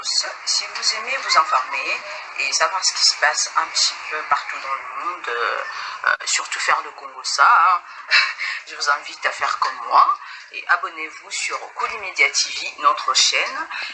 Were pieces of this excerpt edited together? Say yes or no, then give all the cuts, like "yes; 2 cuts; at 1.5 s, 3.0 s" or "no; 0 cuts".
no; 0 cuts